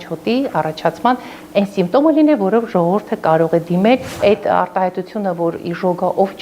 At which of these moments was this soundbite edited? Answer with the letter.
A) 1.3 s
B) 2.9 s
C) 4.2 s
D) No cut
C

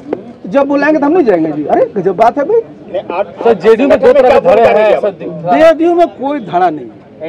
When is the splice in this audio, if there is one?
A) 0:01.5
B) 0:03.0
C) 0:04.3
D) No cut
D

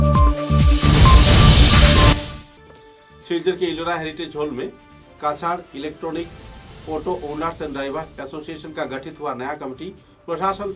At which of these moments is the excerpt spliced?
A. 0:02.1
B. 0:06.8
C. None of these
C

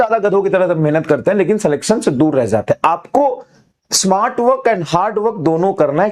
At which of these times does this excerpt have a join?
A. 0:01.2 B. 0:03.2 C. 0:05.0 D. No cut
D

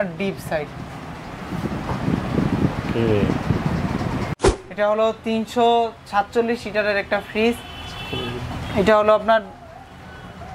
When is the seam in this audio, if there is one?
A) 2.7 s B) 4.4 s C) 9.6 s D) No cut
B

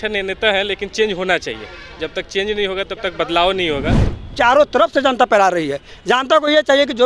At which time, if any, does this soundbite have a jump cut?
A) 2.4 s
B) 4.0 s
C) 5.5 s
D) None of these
B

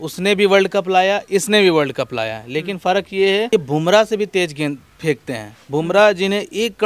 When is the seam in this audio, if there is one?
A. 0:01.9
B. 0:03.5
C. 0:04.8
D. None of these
B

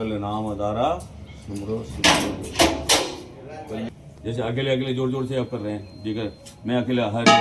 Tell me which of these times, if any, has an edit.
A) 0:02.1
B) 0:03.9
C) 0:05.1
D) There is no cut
B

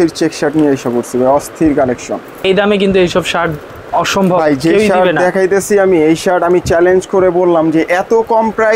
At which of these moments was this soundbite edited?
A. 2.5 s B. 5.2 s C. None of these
A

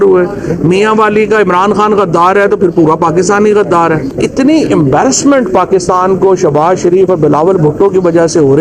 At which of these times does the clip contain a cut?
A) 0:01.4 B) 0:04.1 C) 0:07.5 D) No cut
B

